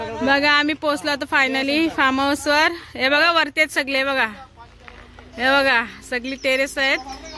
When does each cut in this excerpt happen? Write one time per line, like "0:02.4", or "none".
none